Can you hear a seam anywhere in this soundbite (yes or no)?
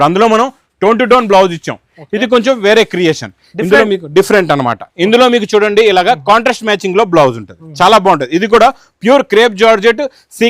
no